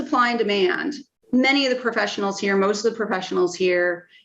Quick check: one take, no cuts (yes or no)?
no